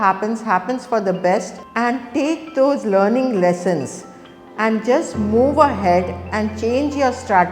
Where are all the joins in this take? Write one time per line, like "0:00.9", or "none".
0:01.6